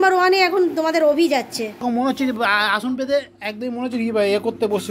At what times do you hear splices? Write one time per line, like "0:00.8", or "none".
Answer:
0:01.8